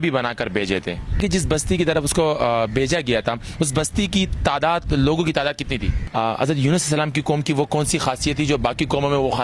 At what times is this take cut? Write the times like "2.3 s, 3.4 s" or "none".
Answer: 1.2 s, 6.0 s

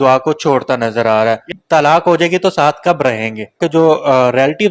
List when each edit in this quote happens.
1.4 s, 3.6 s

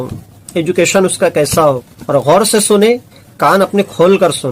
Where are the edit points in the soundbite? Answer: 1.9 s

